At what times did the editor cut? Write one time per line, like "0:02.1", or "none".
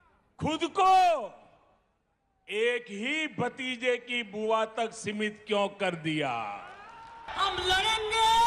0:06.9